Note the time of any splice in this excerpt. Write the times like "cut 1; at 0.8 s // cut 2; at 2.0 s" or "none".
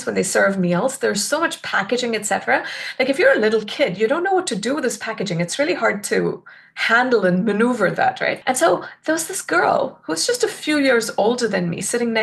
cut 1; at 8.4 s